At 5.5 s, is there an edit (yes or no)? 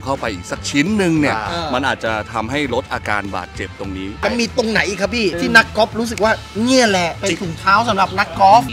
yes